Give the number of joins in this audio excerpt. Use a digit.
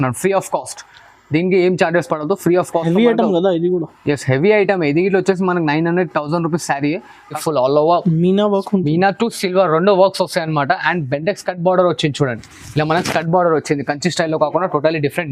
1